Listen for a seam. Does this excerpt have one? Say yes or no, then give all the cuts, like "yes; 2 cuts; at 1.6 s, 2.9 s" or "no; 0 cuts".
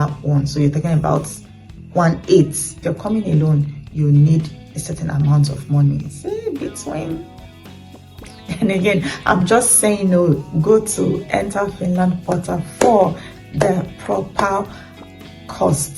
yes; 1 cut; at 2.8 s